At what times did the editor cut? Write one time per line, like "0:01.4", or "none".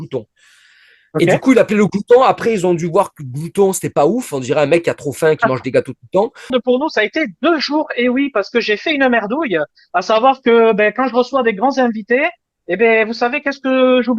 0:06.5